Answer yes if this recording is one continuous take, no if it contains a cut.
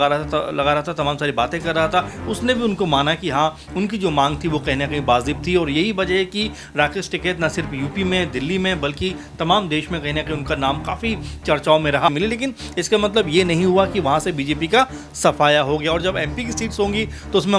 no